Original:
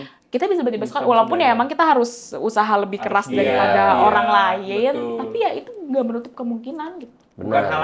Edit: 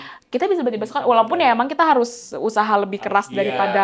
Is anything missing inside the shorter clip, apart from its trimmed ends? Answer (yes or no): no